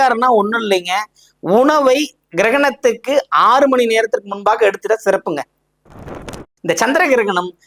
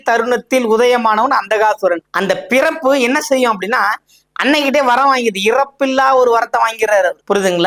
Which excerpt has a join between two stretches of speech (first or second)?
first